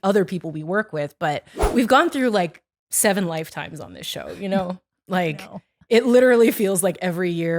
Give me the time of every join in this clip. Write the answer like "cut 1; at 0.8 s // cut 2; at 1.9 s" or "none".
cut 1; at 1.6 s